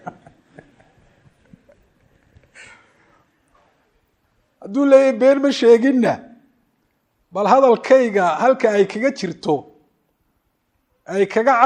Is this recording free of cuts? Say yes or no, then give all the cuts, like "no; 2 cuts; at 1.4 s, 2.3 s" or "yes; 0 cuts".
yes; 0 cuts